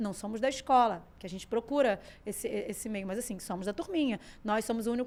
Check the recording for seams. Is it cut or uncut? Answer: uncut